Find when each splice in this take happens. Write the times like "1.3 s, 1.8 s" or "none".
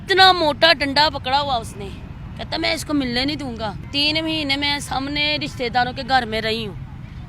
none